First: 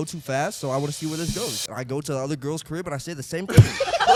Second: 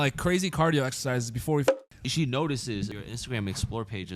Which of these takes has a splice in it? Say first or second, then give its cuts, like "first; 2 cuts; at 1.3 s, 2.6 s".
second; 2 cuts; at 2.1 s, 3.0 s